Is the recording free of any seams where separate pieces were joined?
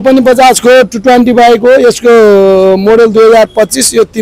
yes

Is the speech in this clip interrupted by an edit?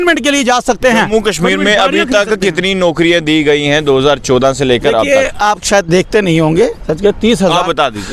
no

